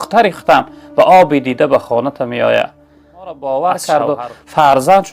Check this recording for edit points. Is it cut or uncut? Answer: cut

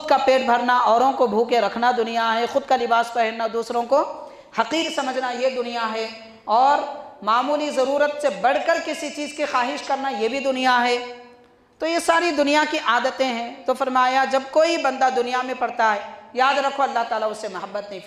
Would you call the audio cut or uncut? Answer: uncut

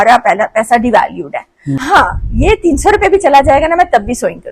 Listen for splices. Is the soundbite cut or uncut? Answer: cut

